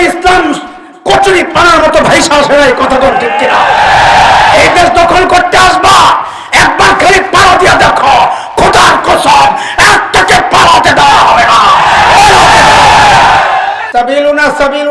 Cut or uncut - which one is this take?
cut